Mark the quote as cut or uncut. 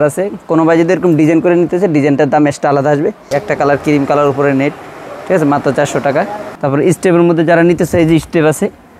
cut